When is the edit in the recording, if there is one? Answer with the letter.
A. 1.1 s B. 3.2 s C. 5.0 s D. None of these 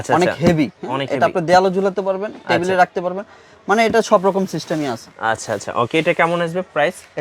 D